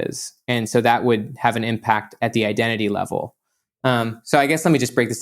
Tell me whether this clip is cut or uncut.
uncut